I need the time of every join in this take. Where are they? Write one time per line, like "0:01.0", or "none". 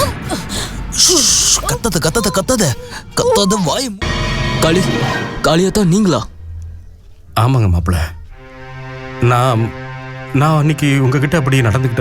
0:03.9